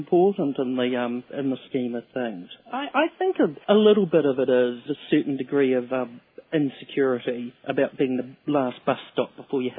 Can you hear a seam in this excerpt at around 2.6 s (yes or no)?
no